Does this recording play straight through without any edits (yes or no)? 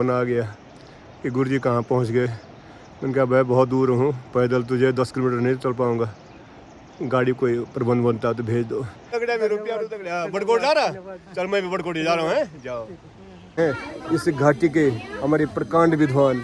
no